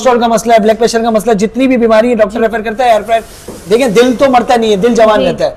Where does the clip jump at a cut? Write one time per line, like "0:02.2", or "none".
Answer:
none